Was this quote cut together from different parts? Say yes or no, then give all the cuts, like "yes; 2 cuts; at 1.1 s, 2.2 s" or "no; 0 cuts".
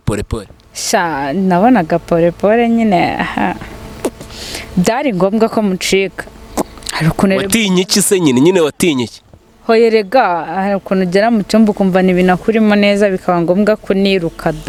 no; 0 cuts